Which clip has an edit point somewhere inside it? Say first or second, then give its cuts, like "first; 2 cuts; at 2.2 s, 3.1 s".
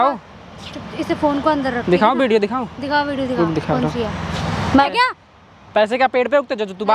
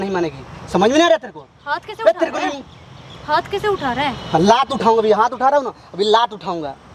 first; 1 cut; at 4.9 s